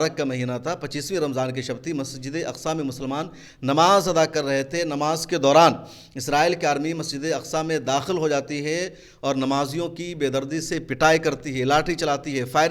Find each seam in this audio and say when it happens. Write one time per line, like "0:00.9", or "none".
none